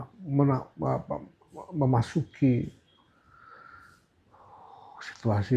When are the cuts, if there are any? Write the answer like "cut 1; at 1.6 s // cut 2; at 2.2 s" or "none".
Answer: none